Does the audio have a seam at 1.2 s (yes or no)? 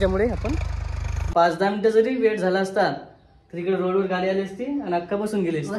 yes